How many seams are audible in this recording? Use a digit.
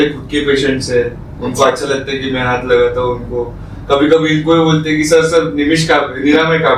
0